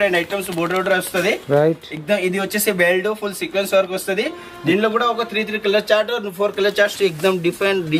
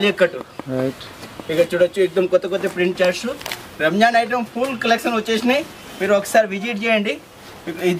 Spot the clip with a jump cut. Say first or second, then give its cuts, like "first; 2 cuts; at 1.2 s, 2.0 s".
first; 1 cut; at 7.0 s